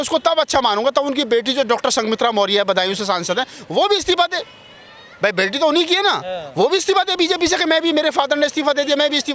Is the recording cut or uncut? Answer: uncut